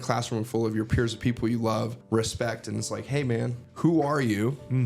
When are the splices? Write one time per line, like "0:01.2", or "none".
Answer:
0:02.0
0:03.6